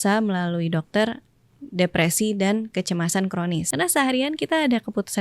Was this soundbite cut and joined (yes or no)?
yes